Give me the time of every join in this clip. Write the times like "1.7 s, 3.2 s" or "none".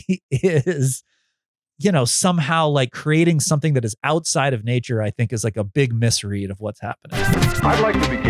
7.2 s